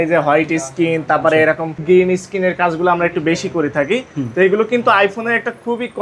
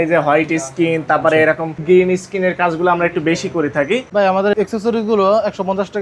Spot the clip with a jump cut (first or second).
second